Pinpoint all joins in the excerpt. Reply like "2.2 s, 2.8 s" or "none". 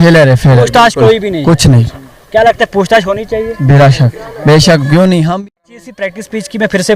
5.4 s